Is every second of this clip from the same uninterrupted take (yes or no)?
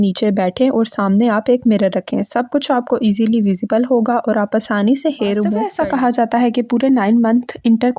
no